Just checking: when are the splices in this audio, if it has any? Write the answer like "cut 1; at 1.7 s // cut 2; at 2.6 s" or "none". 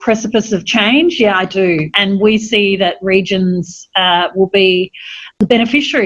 cut 1; at 1.9 s